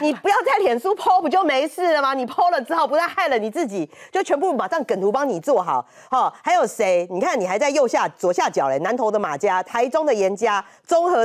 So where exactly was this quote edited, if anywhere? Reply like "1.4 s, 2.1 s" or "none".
none